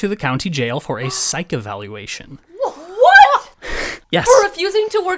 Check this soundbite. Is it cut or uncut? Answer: uncut